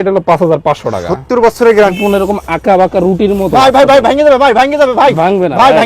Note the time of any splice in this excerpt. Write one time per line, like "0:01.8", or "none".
0:01.9